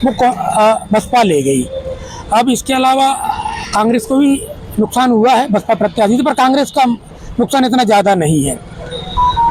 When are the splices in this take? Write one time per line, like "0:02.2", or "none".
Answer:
none